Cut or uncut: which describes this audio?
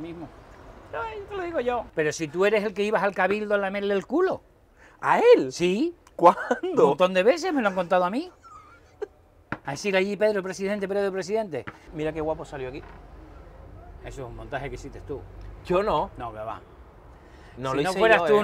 cut